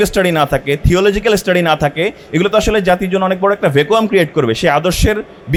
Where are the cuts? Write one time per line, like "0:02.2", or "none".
none